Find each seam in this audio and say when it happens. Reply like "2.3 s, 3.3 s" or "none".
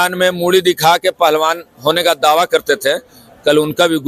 none